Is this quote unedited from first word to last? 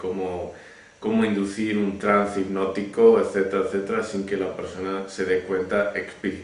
no; 1 cut; at 5.4 s

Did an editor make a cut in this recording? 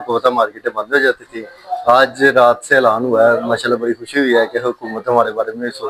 no; 0 cuts

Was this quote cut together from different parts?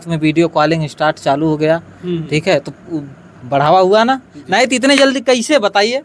no; 0 cuts

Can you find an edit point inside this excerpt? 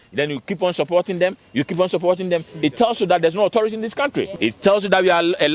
yes; 1 cut; at 4.3 s

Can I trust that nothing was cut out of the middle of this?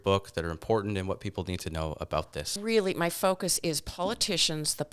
no; 1 cut; at 2.6 s

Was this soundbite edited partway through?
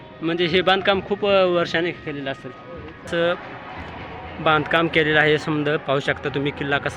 yes; 1 cut; at 3.1 s

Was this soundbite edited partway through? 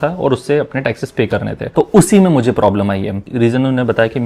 yes; 2 cuts; at 1.6 s, 3.3 s

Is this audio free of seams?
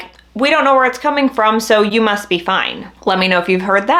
yes; 0 cuts

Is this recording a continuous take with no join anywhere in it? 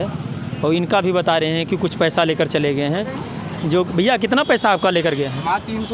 yes; 0 cuts

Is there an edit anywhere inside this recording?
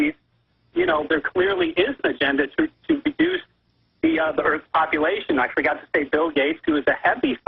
yes; 1 cut; at 2.0 s

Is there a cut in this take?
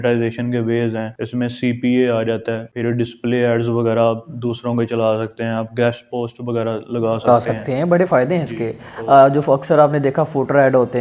yes; 2 cuts; at 1.2 s, 2.7 s

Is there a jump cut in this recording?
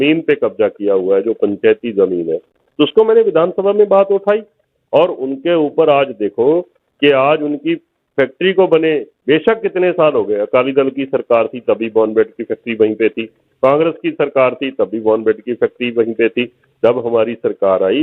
no; 0 cuts

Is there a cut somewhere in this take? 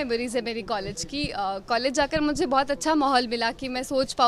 no; 0 cuts

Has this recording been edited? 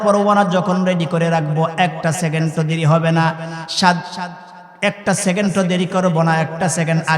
no; 0 cuts

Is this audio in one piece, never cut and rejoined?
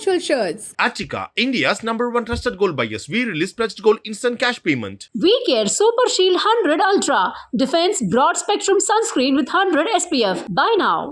yes; 0 cuts

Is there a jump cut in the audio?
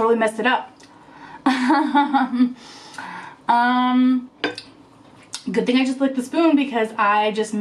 no; 0 cuts

